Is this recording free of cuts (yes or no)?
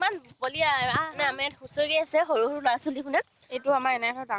no